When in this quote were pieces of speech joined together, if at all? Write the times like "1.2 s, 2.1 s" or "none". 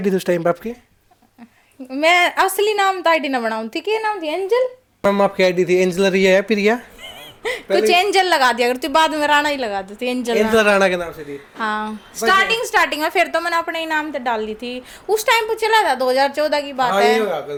none